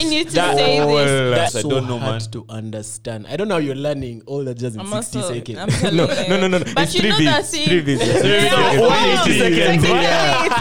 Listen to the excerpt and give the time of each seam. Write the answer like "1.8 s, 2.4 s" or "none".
1.5 s